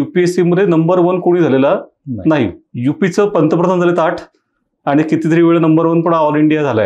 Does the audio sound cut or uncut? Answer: uncut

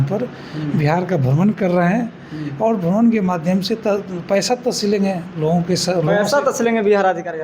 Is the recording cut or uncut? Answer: uncut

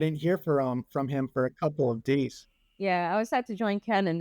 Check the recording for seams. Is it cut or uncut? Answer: cut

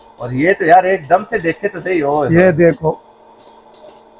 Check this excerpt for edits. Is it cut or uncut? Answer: uncut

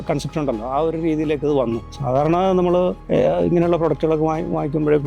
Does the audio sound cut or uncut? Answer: cut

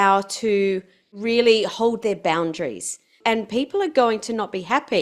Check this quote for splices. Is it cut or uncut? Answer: cut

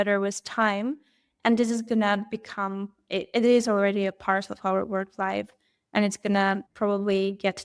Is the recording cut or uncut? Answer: cut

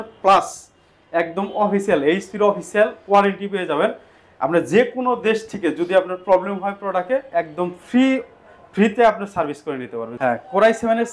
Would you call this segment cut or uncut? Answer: cut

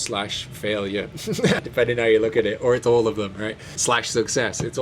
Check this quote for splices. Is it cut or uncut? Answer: cut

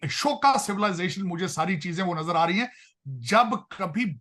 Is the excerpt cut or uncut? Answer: uncut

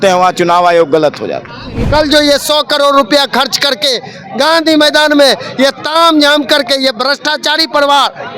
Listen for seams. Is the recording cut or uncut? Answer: cut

